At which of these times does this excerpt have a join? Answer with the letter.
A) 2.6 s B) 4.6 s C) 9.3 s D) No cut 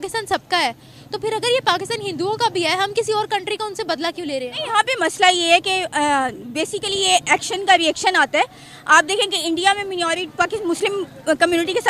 B